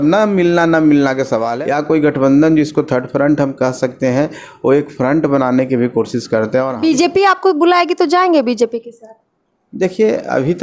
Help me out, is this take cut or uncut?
cut